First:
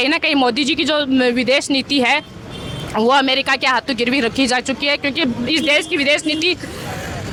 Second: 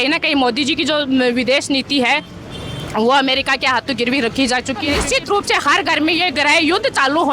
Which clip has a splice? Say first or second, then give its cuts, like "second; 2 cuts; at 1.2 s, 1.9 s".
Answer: second; 1 cut; at 5.0 s